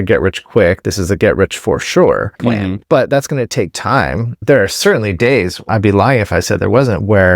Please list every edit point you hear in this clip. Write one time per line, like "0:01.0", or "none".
0:02.4
0:04.4
0:05.7